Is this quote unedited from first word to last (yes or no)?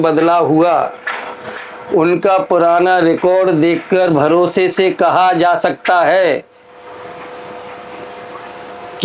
yes